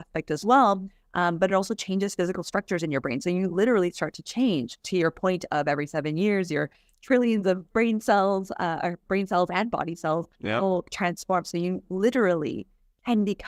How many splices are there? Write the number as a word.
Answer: zero